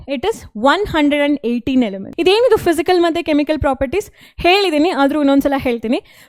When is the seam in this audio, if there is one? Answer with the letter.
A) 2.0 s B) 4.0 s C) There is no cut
A